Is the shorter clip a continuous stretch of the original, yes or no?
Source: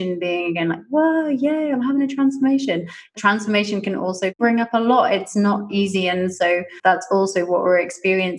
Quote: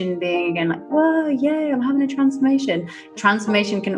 yes